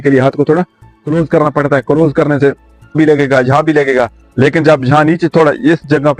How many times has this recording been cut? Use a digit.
1